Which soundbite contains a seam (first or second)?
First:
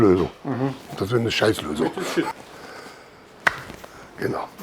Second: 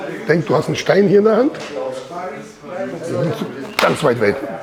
first